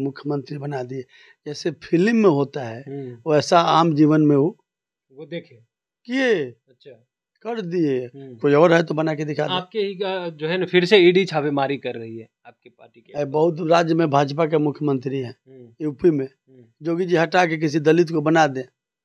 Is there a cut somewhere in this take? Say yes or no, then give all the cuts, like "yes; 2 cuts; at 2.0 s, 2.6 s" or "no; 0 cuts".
no; 0 cuts